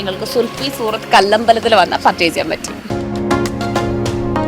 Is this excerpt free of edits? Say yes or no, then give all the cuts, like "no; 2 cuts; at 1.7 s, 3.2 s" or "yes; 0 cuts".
no; 1 cut; at 2.6 s